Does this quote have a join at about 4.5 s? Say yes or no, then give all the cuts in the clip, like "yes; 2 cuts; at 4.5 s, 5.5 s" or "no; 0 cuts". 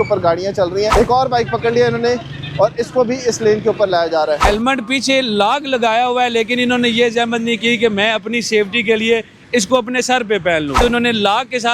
yes; 3 cuts; at 0.9 s, 4.5 s, 10.8 s